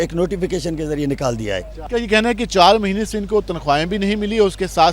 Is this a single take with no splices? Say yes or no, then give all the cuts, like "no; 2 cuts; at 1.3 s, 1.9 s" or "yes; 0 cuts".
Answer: yes; 0 cuts